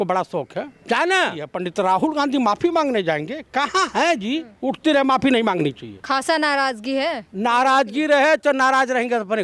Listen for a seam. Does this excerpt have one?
yes; 2 cuts; at 1.6 s, 4.5 s

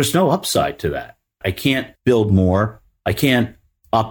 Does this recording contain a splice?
yes; 1 cut; at 1.6 s

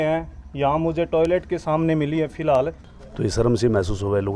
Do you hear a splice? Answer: yes; 1 cut; at 2.7 s

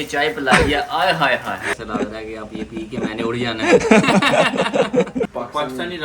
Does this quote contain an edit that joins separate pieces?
yes; 2 cuts; at 1.7 s, 5.3 s

